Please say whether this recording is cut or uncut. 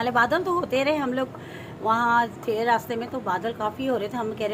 uncut